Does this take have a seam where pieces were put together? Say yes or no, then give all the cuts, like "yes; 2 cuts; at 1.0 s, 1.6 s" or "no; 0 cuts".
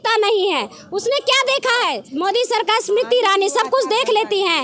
yes; 1 cut; at 2.0 s